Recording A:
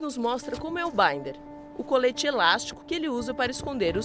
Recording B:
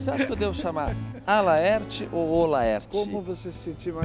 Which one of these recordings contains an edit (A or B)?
A